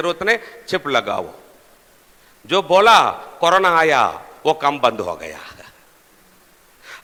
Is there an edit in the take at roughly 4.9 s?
no; 0 cuts

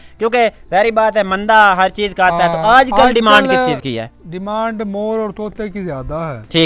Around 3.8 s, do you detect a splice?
no; 0 cuts

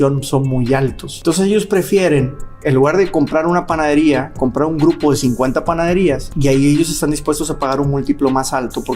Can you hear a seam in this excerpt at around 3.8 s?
no; 2 cuts; at 1.1 s, 6.3 s

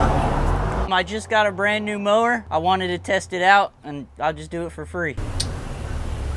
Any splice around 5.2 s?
yes; 2 cuts; at 0.9 s, 5.2 s

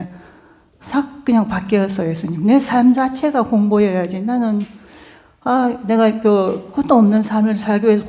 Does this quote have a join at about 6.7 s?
no; 0 cuts

